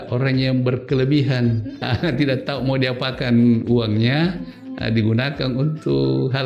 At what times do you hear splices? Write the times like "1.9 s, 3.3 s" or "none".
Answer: 1.8 s